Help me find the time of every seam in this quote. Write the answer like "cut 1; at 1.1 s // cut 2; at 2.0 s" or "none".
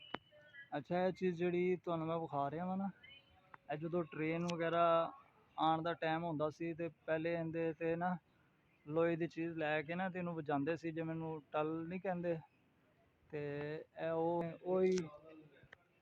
cut 1; at 14.4 s